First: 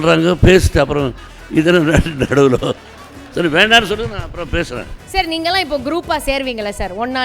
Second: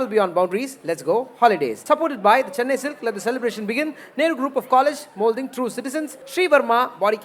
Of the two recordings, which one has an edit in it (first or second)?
first